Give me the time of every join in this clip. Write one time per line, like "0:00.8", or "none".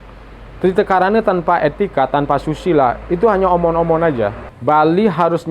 0:04.5